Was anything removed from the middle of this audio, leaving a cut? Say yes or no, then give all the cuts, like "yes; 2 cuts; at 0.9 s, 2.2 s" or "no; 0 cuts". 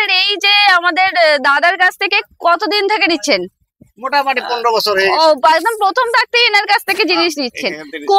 no; 0 cuts